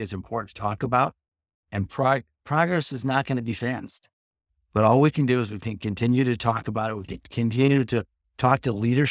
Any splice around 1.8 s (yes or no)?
yes